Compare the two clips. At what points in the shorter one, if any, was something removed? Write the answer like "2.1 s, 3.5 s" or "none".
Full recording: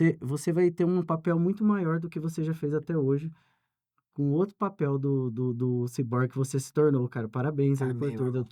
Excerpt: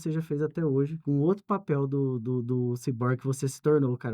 1.0 s